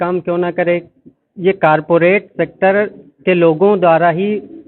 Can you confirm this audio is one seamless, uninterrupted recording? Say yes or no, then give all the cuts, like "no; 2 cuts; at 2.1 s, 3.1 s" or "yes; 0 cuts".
yes; 0 cuts